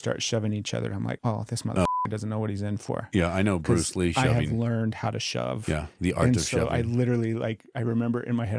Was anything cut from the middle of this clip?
yes; 1 cut; at 1.2 s

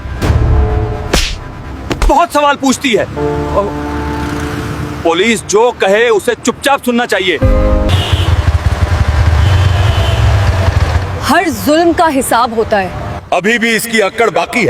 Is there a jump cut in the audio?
no; 0 cuts

